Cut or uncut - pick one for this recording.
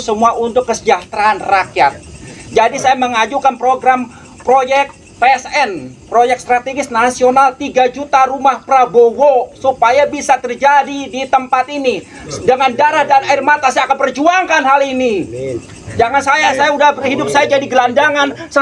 uncut